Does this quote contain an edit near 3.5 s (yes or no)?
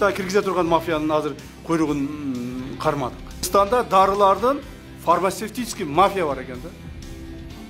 yes